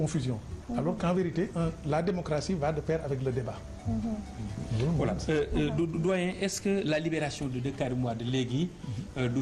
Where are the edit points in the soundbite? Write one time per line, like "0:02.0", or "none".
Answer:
0:05.0

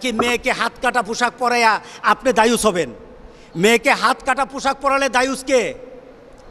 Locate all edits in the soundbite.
none

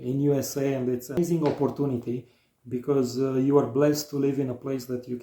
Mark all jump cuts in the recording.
0:01.2

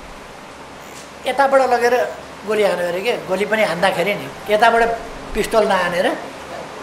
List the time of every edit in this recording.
none

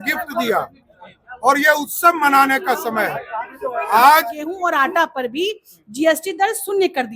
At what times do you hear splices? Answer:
0:04.5

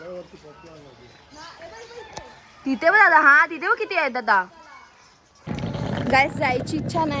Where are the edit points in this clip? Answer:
0:05.4

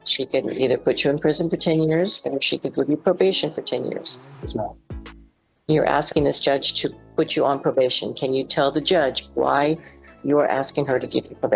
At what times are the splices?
none

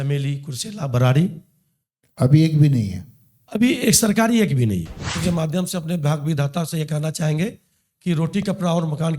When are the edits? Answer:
0:05.2

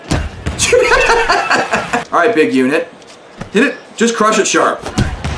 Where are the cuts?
0:02.0

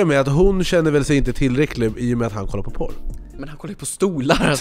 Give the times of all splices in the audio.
none

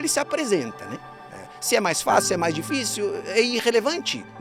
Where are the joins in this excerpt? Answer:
none

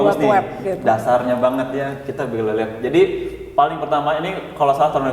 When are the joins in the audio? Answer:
none

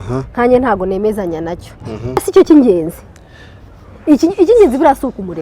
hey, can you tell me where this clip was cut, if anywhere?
0:02.3

